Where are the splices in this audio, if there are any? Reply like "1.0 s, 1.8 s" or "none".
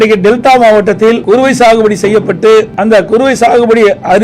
1.2 s, 2.7 s